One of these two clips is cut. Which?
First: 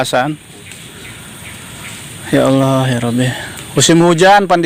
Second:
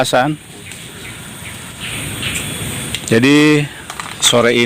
second; 1 cut; at 1.9 s

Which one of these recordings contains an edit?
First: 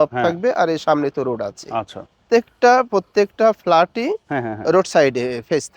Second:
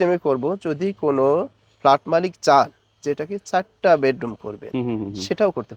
first; 1 cut; at 2.2 s

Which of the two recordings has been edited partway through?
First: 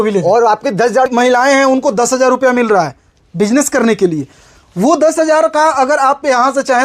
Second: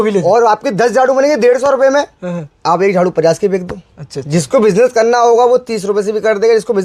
first; 1 cut; at 1.1 s

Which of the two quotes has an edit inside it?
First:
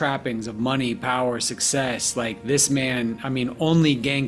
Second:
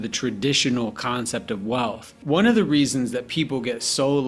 second; 1 cut; at 2.1 s

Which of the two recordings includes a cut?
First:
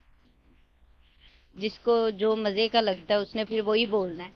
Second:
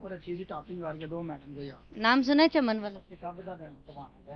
second; 1 cut; at 3.1 s

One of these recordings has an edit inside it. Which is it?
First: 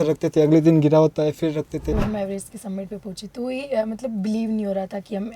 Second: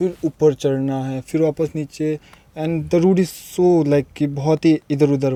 first; 1 cut; at 1.8 s

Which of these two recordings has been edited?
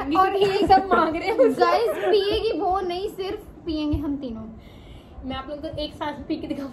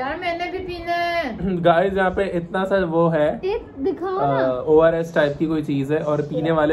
second; 1 cut; at 1.5 s

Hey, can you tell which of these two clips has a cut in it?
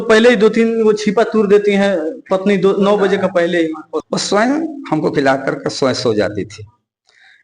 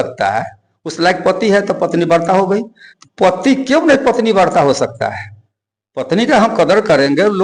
first; 1 cut; at 3.9 s

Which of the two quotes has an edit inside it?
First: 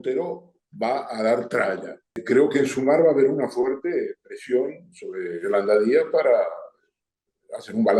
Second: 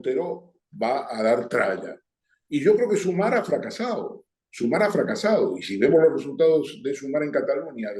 first; 1 cut; at 2.2 s

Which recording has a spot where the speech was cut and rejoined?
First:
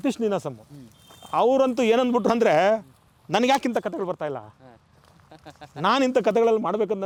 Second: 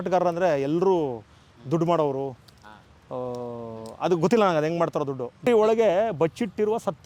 second; 1 cut; at 5.5 s

